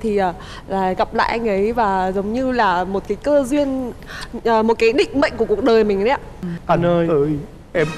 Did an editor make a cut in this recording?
yes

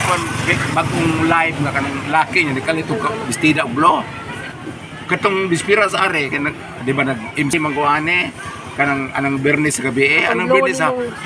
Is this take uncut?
no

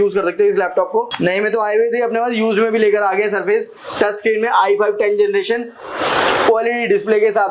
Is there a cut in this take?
yes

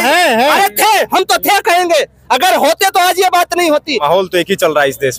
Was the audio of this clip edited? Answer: yes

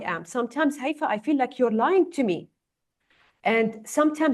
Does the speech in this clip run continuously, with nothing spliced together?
yes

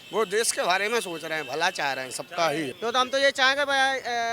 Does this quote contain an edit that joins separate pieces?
yes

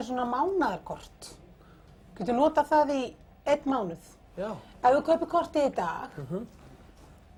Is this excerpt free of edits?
yes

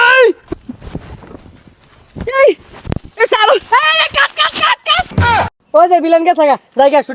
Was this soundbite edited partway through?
yes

